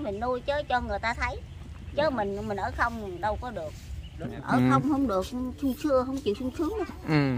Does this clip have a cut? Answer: yes; 1 cut; at 4.2 s

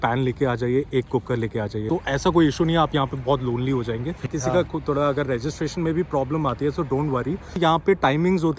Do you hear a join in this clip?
yes; 3 cuts; at 1.9 s, 4.3 s, 7.6 s

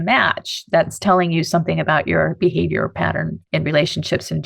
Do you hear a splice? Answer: yes; 1 cut; at 3.4 s

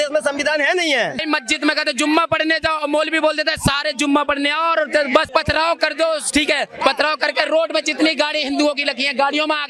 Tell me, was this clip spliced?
yes; 2 cuts; at 1.2 s, 5.3 s

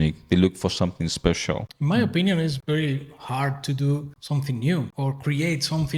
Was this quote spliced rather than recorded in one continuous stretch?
yes; 4 cuts; at 1.7 s, 2.6 s, 4.1 s, 4.9 s

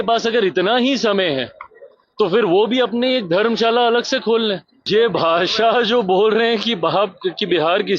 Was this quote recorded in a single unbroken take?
no; 1 cut; at 4.7 s

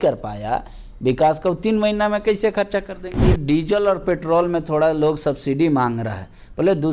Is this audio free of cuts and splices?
no; 1 cut; at 3.2 s

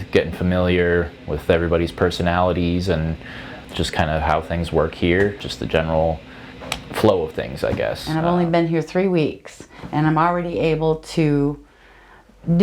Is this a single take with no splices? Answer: no; 1 cut; at 8.0 s

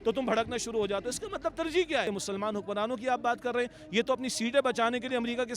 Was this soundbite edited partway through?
yes; 1 cut; at 2.1 s

